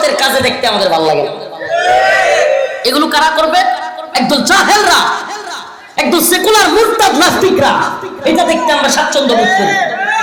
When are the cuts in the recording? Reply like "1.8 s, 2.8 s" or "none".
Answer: none